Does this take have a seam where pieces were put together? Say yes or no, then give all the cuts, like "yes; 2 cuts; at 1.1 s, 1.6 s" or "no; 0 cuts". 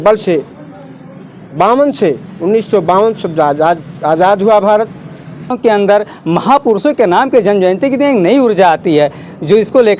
yes; 1 cut; at 5.6 s